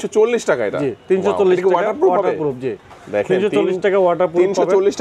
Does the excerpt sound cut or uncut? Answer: uncut